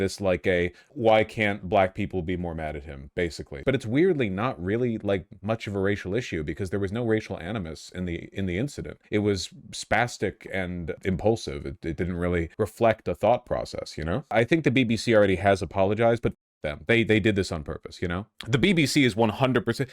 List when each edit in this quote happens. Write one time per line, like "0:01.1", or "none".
0:03.6
0:09.0
0:11.0
0:12.5
0:14.3